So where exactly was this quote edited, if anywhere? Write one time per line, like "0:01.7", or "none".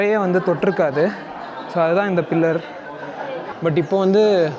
0:03.4